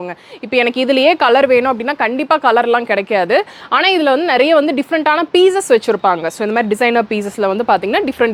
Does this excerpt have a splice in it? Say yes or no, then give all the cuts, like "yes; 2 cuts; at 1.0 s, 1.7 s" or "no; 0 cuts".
no; 0 cuts